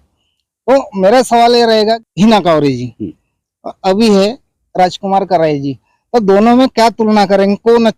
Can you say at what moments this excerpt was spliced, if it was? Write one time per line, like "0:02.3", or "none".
0:02.1